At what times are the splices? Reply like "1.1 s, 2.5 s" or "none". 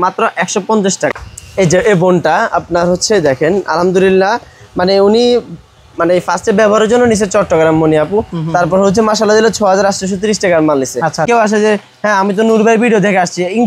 1.2 s, 11.3 s